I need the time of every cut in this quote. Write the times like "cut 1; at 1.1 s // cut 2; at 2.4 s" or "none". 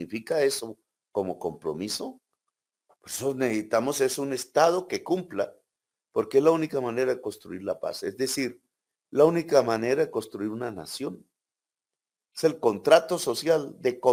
none

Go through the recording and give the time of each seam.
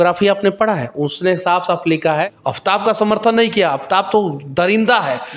cut 1; at 2.3 s

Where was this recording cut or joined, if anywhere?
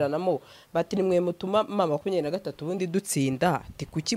none

